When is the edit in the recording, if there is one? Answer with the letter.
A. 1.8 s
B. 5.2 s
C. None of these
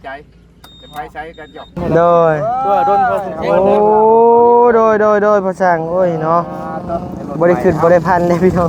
A